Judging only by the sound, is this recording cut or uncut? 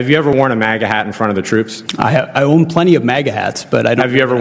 cut